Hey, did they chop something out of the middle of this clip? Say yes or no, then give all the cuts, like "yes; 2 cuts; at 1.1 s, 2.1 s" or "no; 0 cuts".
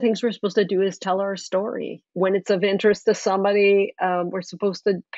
yes; 1 cut; at 2.0 s